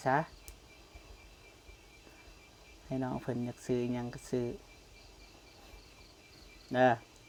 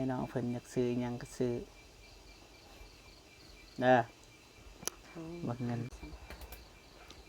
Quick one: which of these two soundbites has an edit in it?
second; 1 cut; at 5.9 s

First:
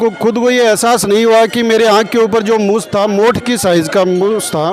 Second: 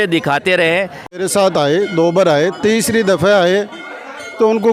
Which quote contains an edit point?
second; 1 cut; at 1.2 s

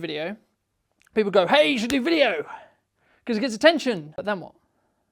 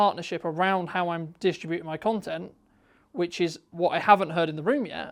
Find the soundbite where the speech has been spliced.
first; 1 cut; at 4.1 s

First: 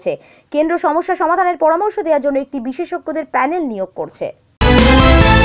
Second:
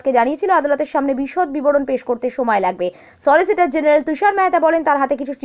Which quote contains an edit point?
first; 1 cut; at 4.4 s

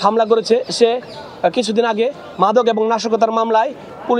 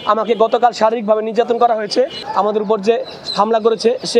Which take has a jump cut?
second; 1 cut; at 2.2 s

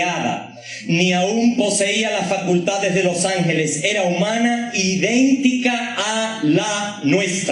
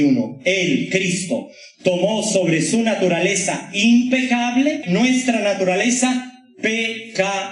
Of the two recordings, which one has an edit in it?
second; 1 cut; at 4.8 s

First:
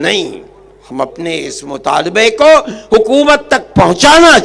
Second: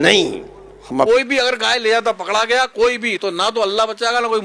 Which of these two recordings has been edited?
second; 1 cut; at 1.1 s

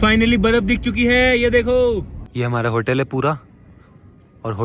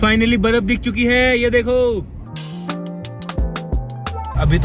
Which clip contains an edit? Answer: first; 1 cut; at 2.2 s

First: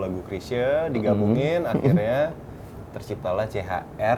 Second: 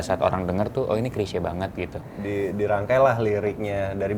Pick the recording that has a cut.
second; 1 cut; at 2.1 s

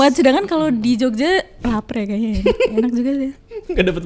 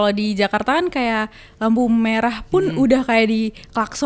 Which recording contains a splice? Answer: first; 1 cut; at 1.6 s

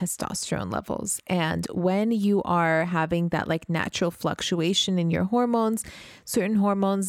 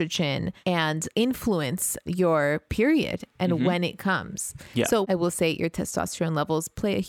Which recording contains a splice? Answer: second; 3 cuts; at 0.9 s, 2.0 s, 5.1 s

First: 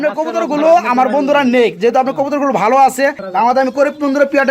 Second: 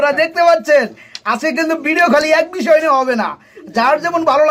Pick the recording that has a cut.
first; 1 cut; at 3.2 s

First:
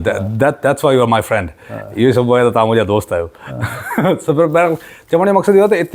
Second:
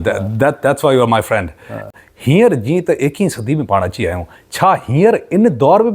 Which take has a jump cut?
second; 1 cut; at 1.9 s

